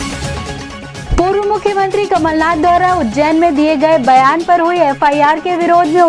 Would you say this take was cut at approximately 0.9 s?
yes; 1 cut; at 0.9 s

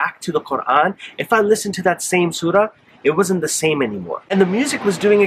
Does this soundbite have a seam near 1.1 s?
no; 1 cut; at 4.1 s

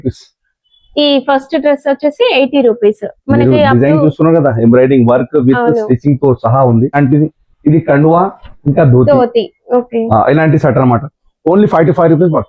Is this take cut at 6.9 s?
yes; 1 cut; at 6.9 s

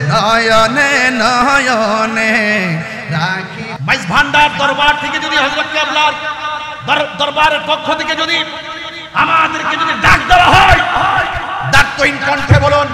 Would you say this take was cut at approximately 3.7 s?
yes; 1 cut; at 3.7 s

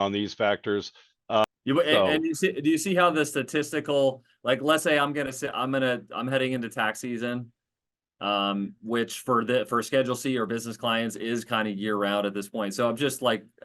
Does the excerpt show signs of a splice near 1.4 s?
yes; 1 cut; at 1.4 s

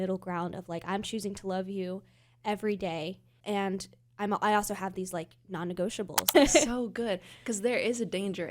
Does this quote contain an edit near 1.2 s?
no; 2 cuts; at 3.3 s, 6.3 s

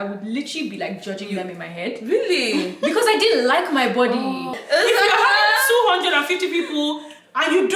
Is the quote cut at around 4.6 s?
yes; 1 cut; at 4.6 s

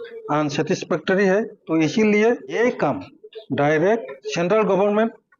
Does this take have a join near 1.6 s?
yes; 3 cuts; at 1.6 s, 2.6 s, 4.2 s

